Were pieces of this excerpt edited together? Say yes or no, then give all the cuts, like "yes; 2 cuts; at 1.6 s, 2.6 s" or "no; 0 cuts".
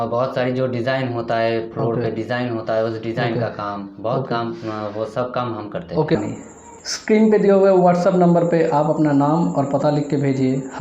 yes; 1 cut; at 6.2 s